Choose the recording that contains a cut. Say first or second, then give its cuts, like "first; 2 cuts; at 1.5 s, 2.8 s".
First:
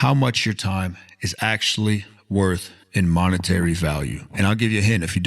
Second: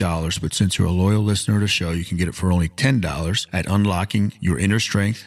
first; 1 cut; at 2.8 s